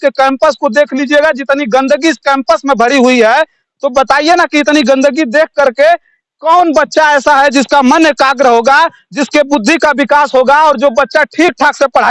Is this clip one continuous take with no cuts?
yes; 0 cuts

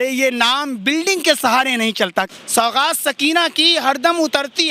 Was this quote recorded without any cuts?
no; 1 cut; at 2.3 s

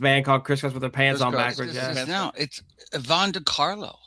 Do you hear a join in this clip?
yes; 1 cut; at 2.0 s

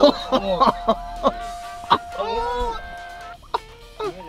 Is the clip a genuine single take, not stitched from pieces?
no; 1 cut; at 2.9 s

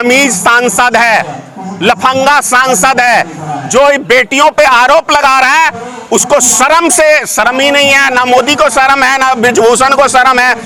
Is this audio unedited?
yes; 0 cuts

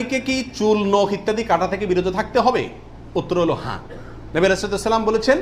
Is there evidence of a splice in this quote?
no; 0 cuts

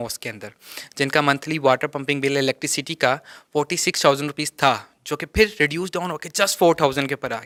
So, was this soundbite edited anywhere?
no; 0 cuts

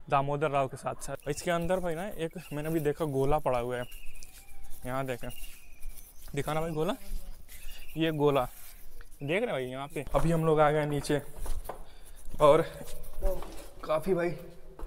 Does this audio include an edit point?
yes; 2 cuts; at 1.1 s, 10.0 s

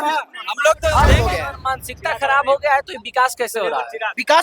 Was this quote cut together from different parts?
yes; 1 cut; at 1.2 s

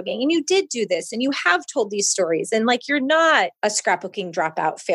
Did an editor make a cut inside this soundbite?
yes; 1 cut; at 3.5 s

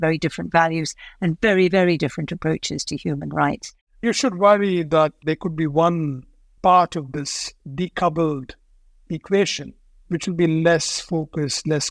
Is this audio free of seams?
no; 1 cut; at 4.0 s

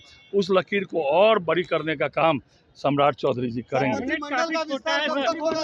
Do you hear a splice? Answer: no; 0 cuts

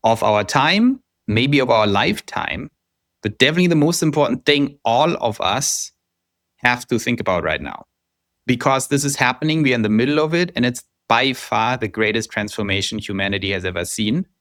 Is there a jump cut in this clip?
no; 0 cuts

